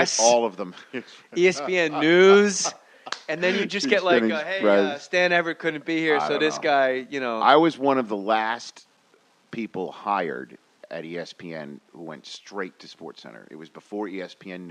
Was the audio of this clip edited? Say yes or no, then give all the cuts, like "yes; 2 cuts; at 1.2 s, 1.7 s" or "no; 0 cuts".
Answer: yes; 1 cut; at 5.6 s